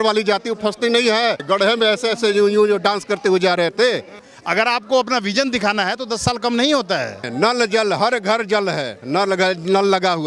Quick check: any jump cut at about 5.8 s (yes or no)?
no